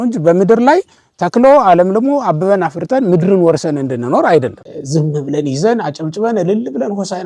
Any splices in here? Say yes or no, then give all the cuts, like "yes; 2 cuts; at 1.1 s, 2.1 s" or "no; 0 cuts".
yes; 1 cut; at 4.6 s